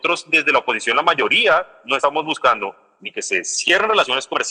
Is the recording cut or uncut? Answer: uncut